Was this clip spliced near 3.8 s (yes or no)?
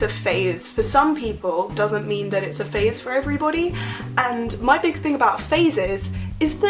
no